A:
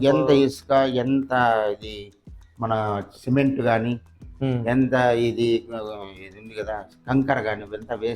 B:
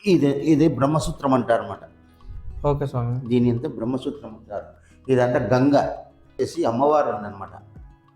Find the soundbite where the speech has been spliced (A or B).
B